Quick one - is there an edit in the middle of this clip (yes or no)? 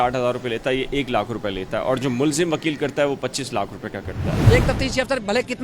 yes